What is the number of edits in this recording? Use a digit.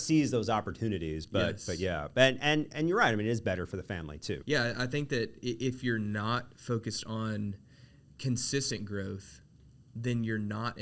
1